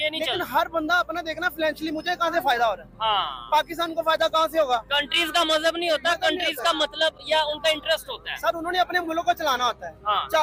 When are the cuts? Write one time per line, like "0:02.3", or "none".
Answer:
none